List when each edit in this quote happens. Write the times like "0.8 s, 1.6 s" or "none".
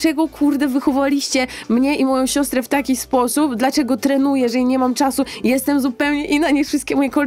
none